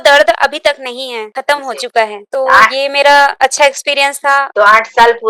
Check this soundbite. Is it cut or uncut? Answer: cut